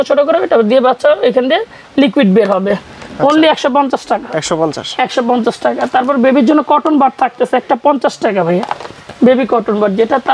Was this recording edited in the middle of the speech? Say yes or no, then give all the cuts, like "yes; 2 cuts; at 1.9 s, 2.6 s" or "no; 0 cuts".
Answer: no; 0 cuts